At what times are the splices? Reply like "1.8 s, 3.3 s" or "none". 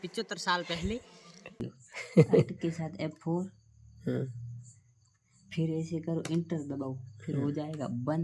1.6 s